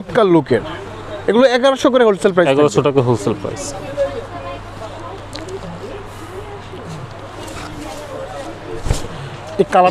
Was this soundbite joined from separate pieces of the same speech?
no; 0 cuts

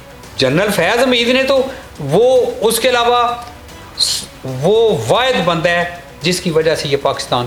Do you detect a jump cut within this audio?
no; 0 cuts

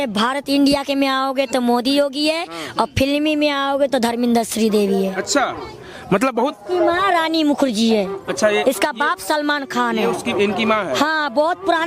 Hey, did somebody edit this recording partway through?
no; 0 cuts

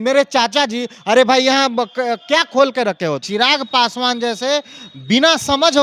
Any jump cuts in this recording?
yes; 1 cut; at 3.2 s

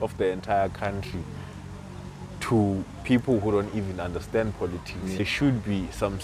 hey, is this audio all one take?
no; 1 cut; at 5.2 s

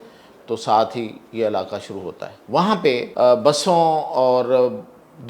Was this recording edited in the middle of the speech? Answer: yes; 2 cuts; at 2.3 s, 3.1 s

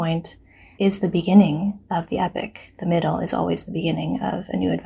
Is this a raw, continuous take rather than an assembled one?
yes; 0 cuts

